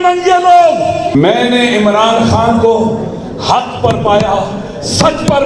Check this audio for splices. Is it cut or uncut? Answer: cut